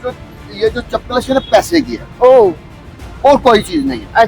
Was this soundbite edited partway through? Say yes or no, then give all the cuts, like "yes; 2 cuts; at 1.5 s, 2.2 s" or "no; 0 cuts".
no; 0 cuts